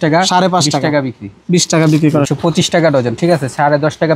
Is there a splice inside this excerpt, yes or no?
yes